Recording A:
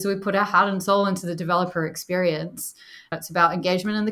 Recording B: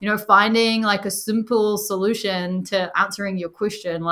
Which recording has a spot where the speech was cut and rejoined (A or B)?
A